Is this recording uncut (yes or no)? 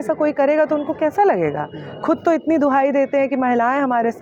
yes